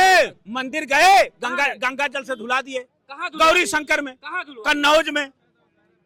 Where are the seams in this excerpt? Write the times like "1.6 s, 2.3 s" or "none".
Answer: none